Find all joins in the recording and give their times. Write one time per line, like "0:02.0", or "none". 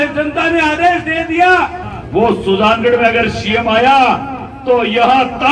0:01.9